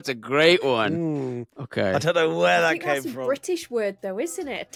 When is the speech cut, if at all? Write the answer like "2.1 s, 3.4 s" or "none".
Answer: none